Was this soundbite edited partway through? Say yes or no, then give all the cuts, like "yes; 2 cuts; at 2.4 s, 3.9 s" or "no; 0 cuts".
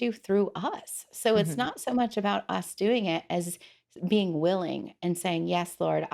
no; 0 cuts